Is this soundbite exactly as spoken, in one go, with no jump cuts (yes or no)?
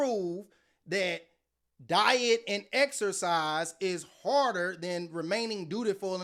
yes